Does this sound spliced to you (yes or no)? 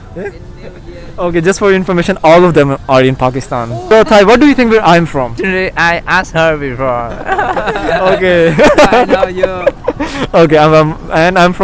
yes